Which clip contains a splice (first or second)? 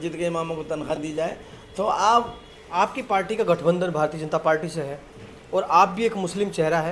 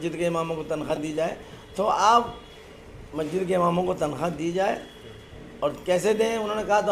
first